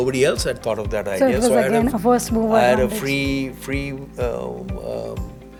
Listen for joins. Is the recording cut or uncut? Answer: uncut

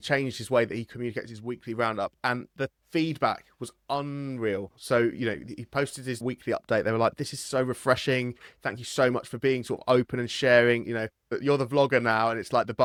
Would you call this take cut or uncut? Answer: uncut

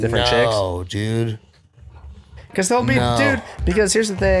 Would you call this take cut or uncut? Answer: cut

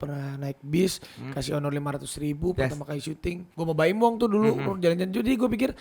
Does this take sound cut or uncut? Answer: cut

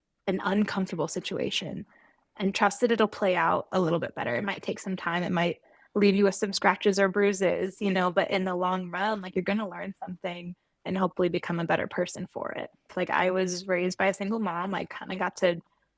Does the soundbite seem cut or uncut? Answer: cut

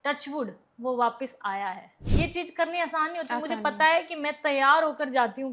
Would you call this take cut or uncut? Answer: cut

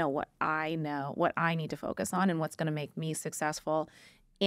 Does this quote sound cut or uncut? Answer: uncut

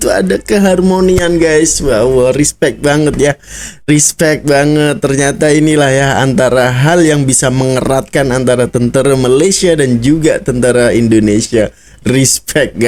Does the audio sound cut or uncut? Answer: uncut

